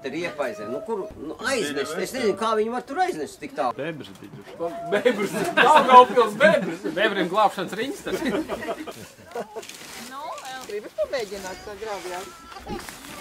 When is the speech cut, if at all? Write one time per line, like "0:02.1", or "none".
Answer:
0:01.2
0:03.7
0:08.9